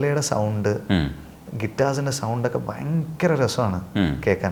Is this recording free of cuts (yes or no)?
yes